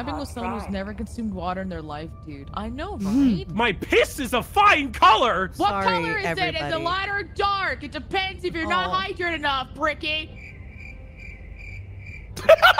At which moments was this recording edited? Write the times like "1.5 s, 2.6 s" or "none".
5.5 s